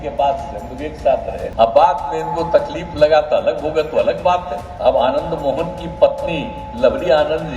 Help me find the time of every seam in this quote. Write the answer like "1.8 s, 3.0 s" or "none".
1.4 s, 4.6 s